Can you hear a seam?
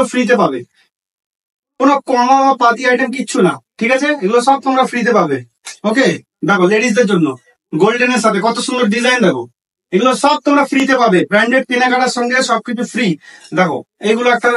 no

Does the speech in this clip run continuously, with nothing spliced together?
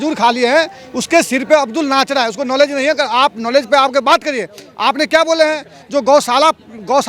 yes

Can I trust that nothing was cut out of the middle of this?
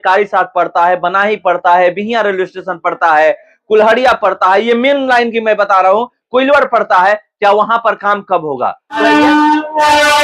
no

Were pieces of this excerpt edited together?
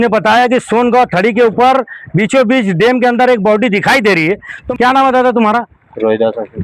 yes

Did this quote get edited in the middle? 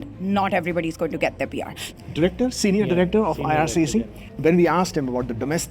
yes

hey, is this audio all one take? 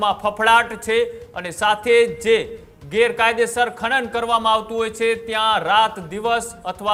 yes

